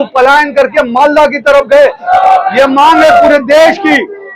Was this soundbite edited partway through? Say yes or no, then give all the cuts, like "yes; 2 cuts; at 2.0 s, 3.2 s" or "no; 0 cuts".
yes; 1 cut; at 2.0 s